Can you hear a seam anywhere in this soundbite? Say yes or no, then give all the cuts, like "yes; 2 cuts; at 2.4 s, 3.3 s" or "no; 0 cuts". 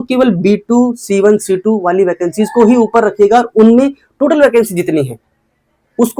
no; 0 cuts